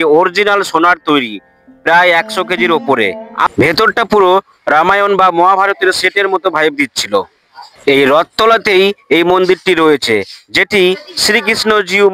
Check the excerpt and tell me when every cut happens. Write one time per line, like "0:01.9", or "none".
0:03.5
0:07.7